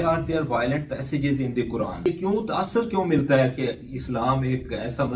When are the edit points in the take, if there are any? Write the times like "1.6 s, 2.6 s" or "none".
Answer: 2.1 s